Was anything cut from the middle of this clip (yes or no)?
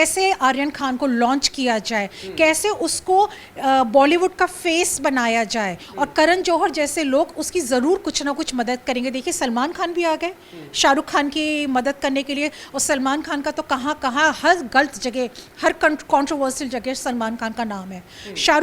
no